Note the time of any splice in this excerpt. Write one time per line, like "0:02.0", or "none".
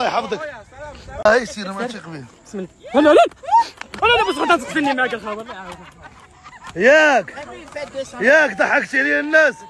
0:01.2